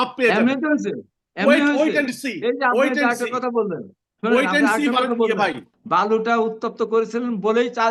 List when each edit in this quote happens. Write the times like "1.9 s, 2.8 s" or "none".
5.7 s